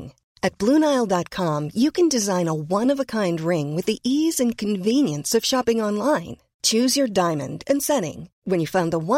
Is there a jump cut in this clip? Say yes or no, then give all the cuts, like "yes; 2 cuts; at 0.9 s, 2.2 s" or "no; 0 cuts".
no; 0 cuts